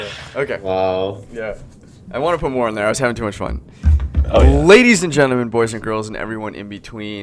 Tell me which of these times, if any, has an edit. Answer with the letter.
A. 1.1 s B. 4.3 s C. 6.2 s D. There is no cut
C